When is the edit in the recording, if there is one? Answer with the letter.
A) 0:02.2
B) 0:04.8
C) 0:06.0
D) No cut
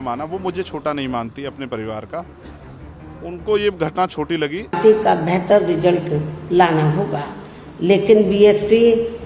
B